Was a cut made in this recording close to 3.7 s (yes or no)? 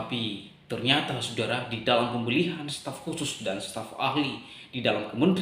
no